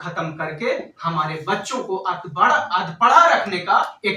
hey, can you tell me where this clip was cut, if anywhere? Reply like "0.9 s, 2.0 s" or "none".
none